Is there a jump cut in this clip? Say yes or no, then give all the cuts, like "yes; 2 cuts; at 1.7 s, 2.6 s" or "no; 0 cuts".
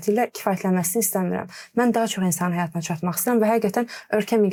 no; 0 cuts